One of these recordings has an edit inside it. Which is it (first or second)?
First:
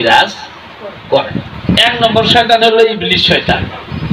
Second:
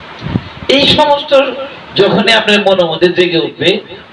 first